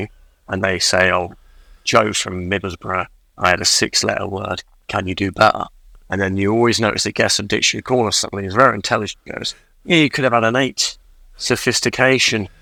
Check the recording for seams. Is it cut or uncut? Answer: uncut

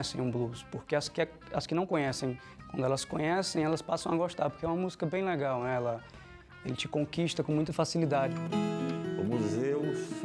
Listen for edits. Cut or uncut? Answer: cut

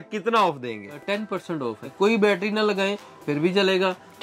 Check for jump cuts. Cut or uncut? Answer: cut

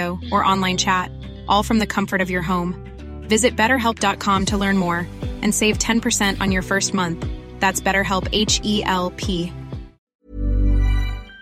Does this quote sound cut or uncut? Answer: cut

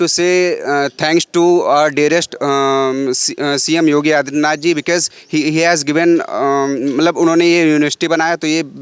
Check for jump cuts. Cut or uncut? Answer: uncut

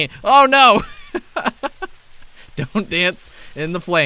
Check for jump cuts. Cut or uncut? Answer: uncut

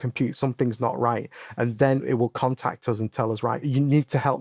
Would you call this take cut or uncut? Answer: cut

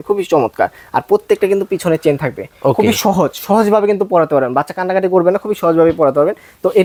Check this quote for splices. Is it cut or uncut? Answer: uncut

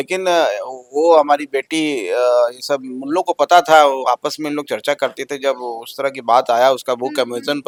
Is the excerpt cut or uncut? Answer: uncut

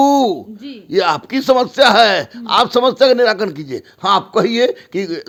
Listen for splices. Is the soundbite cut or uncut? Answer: uncut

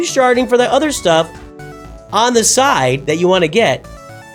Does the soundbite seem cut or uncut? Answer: uncut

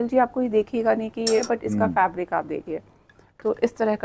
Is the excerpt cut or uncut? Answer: cut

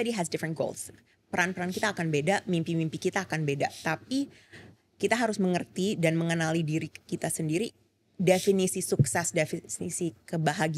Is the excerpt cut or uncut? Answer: uncut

